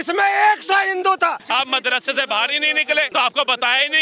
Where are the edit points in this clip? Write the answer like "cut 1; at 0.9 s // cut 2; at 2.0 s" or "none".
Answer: cut 1; at 1.4 s // cut 2; at 3.1 s

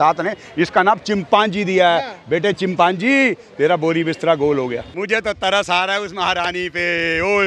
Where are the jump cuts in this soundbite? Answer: cut 1; at 4.9 s

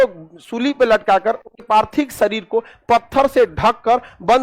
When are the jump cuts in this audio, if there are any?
cut 1; at 1.6 s

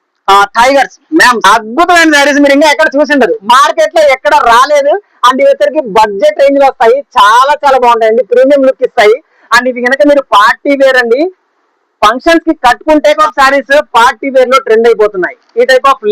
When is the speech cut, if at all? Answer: cut 1; at 1.4 s // cut 2; at 13.2 s

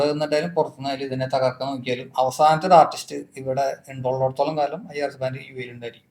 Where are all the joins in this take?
none

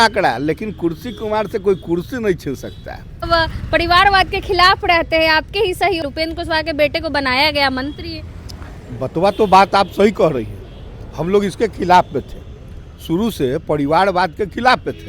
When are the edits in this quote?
cut 1; at 3.3 s // cut 2; at 6.0 s

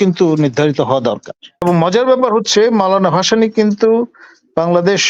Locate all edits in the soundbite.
cut 1; at 1.6 s

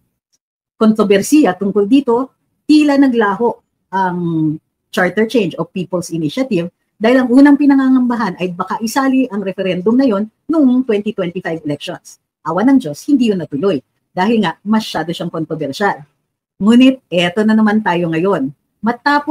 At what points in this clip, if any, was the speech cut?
none

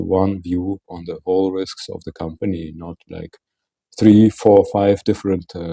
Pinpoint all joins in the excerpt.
none

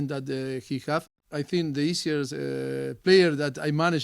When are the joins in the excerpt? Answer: cut 1; at 1.2 s

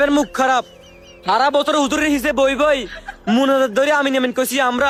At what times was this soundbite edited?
none

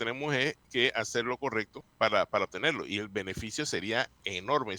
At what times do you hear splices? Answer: cut 1; at 1.8 s

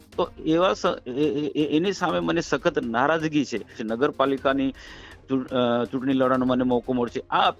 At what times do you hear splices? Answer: cut 1; at 3.8 s

